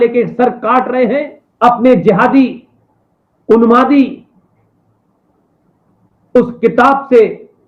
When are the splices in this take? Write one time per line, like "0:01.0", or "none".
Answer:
0:01.4